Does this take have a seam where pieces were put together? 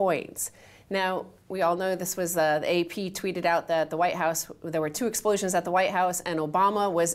yes; 1 cut; at 4.4 s

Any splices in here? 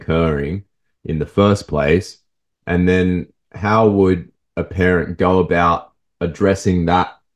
no; 0 cuts

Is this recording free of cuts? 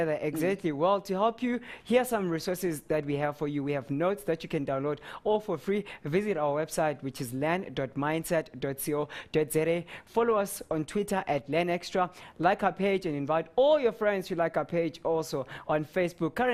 yes; 0 cuts

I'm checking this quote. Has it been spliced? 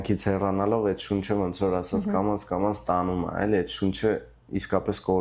no; 0 cuts

